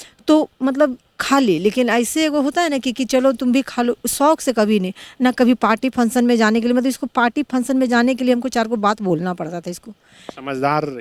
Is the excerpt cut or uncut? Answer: uncut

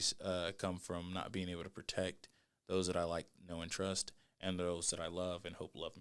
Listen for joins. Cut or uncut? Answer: uncut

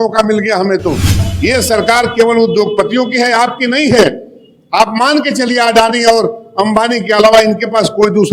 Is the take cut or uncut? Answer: cut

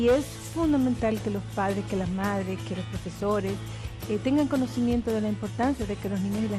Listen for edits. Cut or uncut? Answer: cut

